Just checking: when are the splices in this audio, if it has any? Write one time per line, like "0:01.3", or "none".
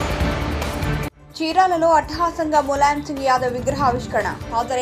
none